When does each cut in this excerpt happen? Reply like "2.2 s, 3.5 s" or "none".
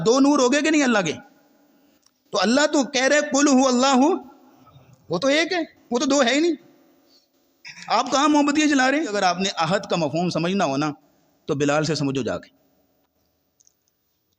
9.1 s